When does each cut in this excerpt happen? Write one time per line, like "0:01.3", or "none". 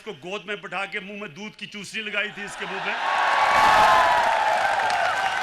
none